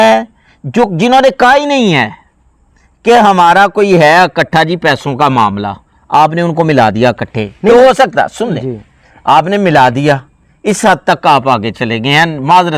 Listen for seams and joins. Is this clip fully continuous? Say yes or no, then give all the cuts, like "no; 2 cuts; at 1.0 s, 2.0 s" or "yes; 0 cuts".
yes; 0 cuts